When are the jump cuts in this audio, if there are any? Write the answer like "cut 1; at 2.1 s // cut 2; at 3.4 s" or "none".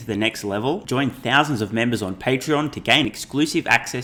none